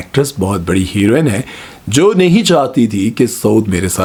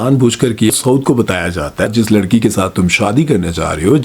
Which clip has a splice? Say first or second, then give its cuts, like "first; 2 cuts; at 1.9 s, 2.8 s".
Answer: second; 2 cuts; at 0.7 s, 1.9 s